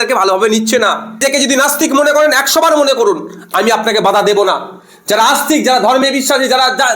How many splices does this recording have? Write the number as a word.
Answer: one